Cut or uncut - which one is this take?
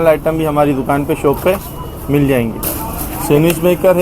cut